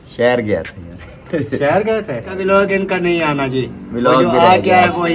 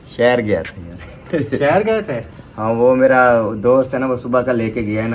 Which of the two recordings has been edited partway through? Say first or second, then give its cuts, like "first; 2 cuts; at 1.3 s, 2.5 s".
first; 1 cut; at 2.3 s